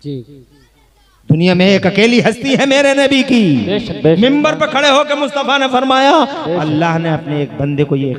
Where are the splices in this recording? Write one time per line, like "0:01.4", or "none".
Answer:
none